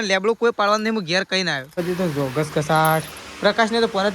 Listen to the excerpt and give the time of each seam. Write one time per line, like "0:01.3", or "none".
0:01.7